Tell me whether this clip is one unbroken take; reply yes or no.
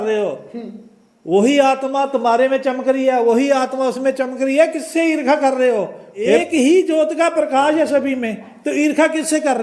no